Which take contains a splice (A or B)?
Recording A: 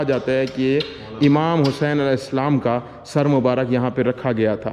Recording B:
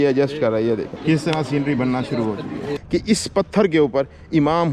B